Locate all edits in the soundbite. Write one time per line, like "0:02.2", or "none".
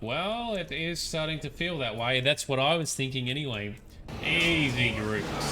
0:04.1